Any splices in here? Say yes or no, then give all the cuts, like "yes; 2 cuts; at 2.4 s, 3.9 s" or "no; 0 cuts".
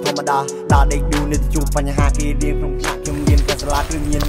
no; 0 cuts